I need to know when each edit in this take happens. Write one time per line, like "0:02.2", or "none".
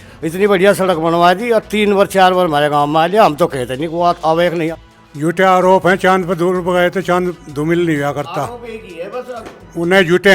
0:04.8